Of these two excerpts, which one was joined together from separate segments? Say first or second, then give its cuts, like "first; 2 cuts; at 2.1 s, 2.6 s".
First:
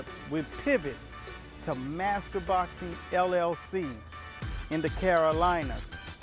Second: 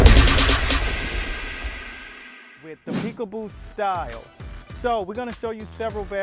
second; 1 cut; at 3.0 s